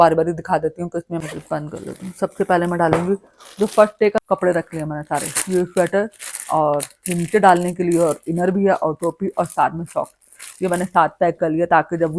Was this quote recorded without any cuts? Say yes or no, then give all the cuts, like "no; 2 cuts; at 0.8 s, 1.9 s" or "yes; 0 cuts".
no; 2 cuts; at 1.2 s, 4.2 s